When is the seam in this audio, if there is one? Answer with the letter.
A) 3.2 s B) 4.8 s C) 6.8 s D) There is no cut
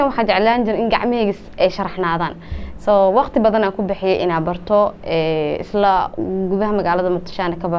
D